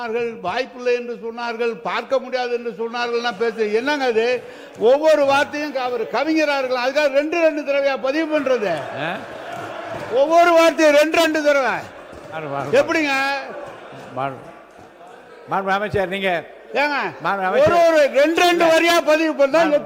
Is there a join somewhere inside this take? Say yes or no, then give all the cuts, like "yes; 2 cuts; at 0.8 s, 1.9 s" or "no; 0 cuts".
no; 0 cuts